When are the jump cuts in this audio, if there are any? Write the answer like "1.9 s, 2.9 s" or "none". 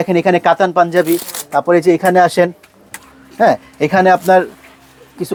none